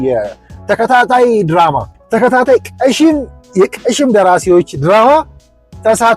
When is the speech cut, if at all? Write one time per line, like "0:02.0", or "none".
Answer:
0:01.9